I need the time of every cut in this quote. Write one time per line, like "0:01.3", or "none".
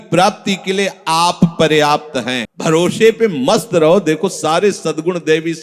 0:02.4